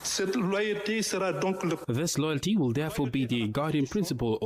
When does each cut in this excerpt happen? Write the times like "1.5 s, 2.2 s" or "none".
1.8 s